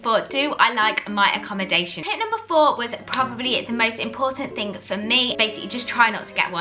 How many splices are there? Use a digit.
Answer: 2